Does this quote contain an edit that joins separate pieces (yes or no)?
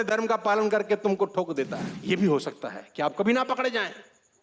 yes